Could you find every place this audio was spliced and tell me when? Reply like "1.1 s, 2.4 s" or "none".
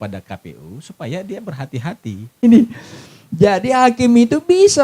2.4 s